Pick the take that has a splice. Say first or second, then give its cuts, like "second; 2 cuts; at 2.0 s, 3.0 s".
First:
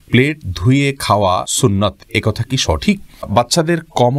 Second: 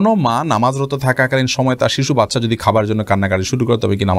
first; 2 cuts; at 1.5 s, 3.3 s